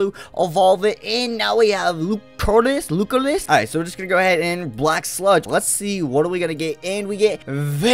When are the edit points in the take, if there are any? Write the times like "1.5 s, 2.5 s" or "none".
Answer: 3.4 s, 5.5 s